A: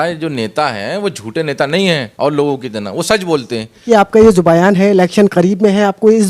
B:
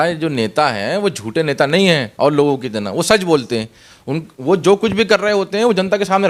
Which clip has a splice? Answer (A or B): A